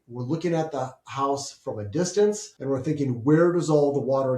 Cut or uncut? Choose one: cut